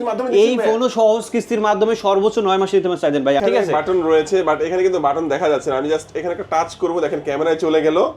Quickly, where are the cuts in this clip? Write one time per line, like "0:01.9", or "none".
0:03.4